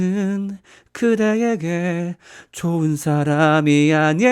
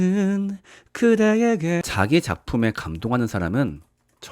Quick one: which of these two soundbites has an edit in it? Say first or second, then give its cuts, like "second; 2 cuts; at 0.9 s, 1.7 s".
second; 1 cut; at 1.8 s